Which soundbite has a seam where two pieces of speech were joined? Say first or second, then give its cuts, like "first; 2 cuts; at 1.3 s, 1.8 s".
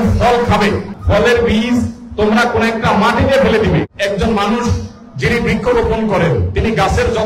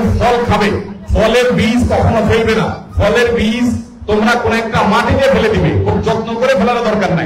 first; 2 cuts; at 0.9 s, 3.9 s